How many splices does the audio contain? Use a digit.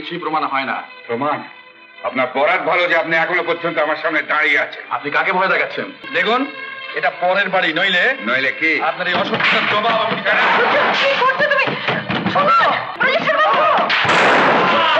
2